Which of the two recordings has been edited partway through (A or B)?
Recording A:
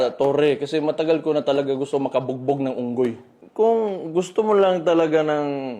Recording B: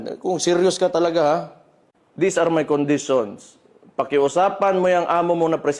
A